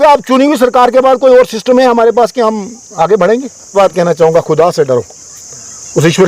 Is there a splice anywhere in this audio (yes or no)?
yes